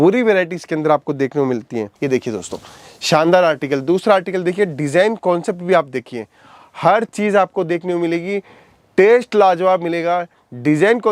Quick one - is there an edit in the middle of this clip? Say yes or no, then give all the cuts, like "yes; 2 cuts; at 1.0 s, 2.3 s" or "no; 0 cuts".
yes; 1 cut; at 1.9 s